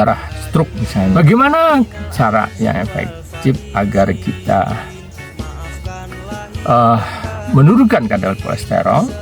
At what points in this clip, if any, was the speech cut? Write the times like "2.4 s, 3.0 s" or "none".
1.1 s